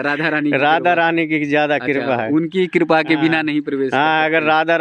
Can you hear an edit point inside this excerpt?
no; 0 cuts

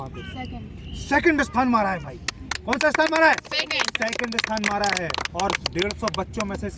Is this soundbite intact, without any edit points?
yes; 0 cuts

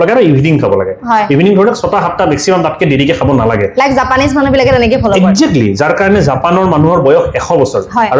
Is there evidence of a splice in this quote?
no; 0 cuts

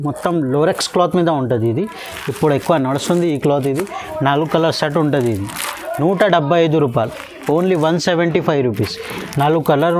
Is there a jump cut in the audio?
no; 0 cuts

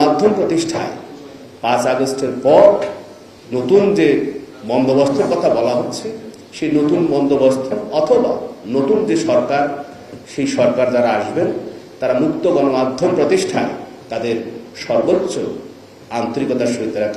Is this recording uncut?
yes; 0 cuts

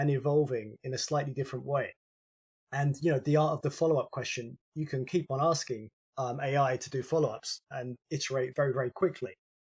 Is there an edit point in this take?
no; 0 cuts

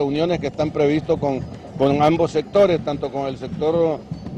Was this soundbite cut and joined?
yes; 1 cut; at 3.1 s

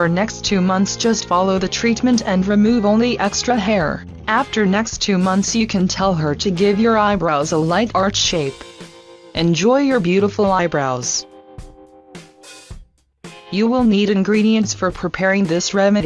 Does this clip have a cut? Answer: no; 0 cuts

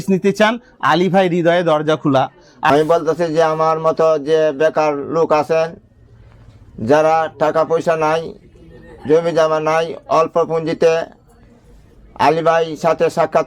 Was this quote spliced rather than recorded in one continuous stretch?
yes; 1 cut; at 2.7 s

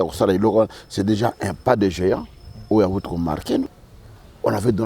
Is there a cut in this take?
yes; 1 cut; at 3.7 s

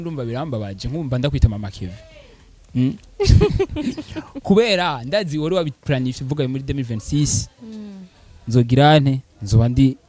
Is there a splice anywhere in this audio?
no; 0 cuts

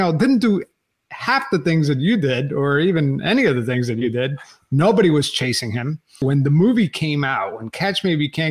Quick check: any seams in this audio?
yes; 1 cut; at 6.2 s

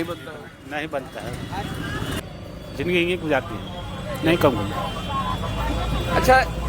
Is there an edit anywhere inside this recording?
yes; 1 cut; at 2.2 s

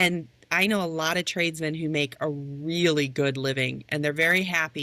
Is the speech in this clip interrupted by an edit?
no; 0 cuts

